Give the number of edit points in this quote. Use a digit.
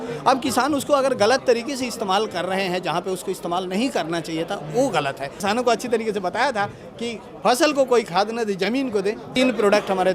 2